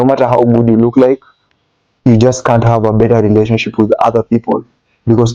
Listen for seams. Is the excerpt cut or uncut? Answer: uncut